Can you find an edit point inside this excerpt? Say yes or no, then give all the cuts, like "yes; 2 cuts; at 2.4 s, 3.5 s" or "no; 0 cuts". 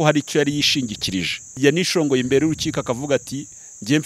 yes; 1 cut; at 1.5 s